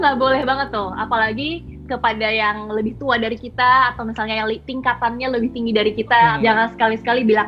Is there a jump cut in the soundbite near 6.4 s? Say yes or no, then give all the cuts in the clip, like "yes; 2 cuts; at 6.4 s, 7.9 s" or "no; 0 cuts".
yes; 1 cut; at 6.4 s